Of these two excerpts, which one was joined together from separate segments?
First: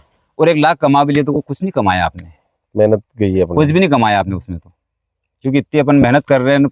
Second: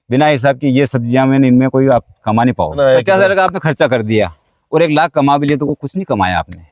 second; 1 cut; at 2.8 s

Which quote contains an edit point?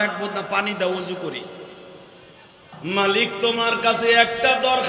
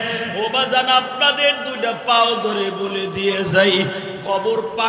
first; 1 cut; at 2.7 s

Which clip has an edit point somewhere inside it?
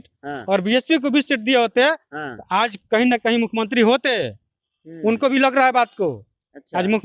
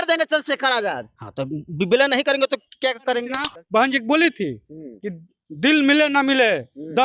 second; 1 cut; at 3.5 s

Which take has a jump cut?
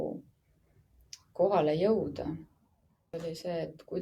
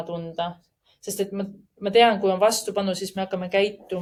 first; 1 cut; at 3.1 s

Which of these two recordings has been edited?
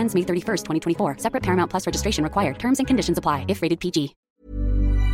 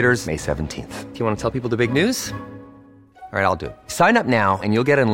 first; 1 cut; at 4.2 s

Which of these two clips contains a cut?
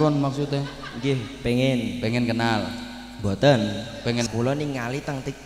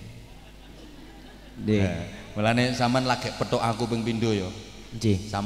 first; 1 cut; at 4.3 s

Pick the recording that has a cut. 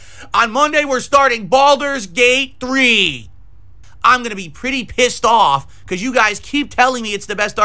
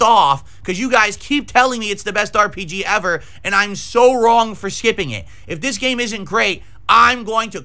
first; 1 cut; at 3.9 s

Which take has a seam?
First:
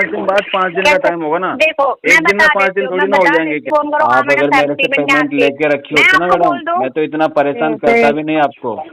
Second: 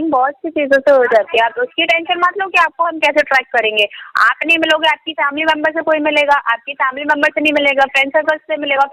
first; 1 cut; at 3.7 s

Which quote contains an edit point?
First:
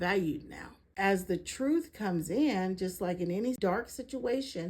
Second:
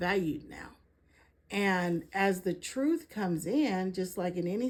first; 2 cuts; at 0.9 s, 3.6 s

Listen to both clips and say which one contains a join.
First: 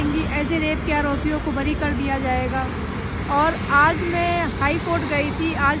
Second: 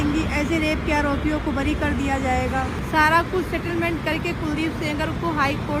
second; 1 cut; at 2.8 s

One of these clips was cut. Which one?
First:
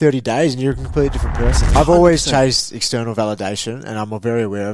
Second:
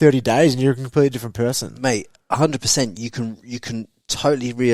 first; 1 cut; at 1.7 s

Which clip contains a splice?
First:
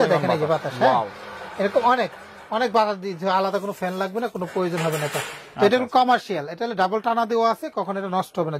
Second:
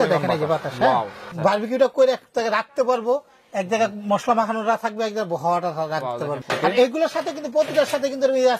second; 2 cuts; at 1.2 s, 6.4 s

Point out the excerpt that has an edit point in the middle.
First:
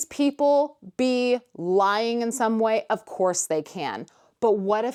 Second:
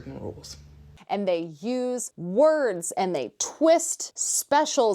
second; 1 cut; at 1.1 s

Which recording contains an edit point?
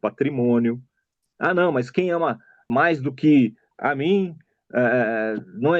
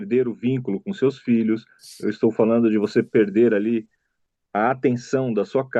first; 3 cuts; at 1.3 s, 2.5 s, 3.7 s

